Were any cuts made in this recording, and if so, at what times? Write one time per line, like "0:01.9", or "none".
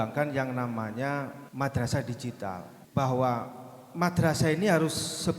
0:01.4
0:02.7